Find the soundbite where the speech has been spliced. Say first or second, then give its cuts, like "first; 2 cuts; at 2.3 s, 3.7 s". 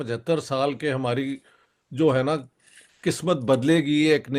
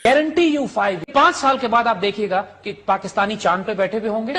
second; 1 cut; at 1.1 s